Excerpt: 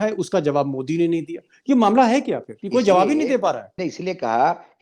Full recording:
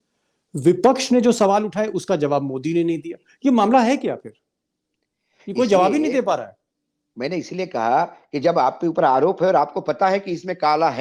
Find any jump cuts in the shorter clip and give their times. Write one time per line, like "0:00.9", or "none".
0:02.5
0:03.7